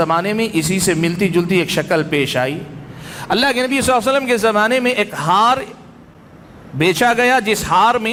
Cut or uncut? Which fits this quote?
uncut